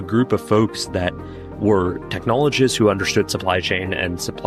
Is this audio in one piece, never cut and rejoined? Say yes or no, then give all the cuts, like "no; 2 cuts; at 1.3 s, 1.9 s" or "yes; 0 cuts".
yes; 0 cuts